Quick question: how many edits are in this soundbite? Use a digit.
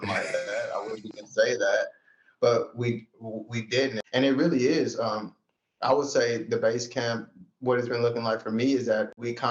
1